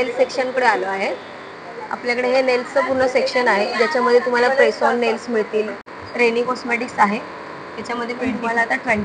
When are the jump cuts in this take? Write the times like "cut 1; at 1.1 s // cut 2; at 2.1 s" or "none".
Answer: cut 1; at 6.0 s